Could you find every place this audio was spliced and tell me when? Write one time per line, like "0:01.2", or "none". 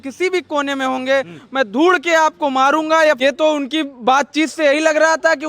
0:03.2